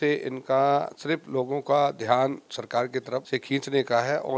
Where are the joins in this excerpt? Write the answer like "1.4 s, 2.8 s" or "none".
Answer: 3.3 s